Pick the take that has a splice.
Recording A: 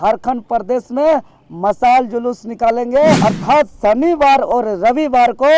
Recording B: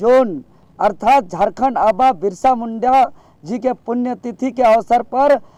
A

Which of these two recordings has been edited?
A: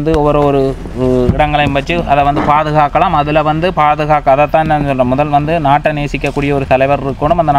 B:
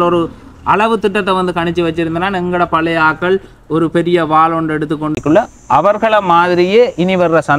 B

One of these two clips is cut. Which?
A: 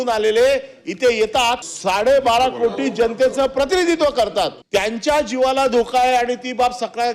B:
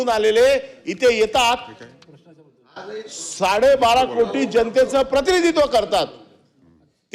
A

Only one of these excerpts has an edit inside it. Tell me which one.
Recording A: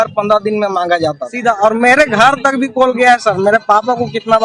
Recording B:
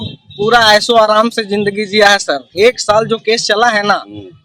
A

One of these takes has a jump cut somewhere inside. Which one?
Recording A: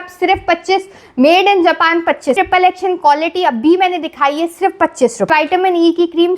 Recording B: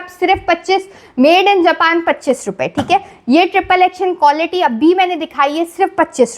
A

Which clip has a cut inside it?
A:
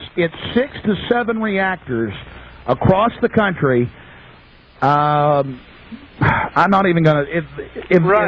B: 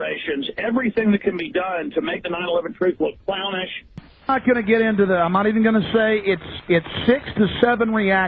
B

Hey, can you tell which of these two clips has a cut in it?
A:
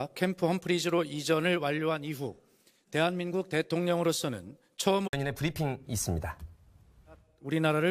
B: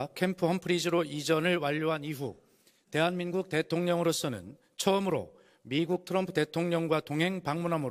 B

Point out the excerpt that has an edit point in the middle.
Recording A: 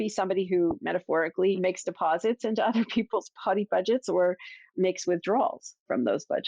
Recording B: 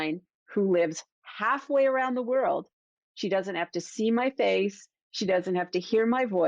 A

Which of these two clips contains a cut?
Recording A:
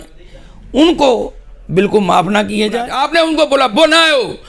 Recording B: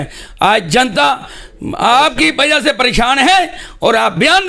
A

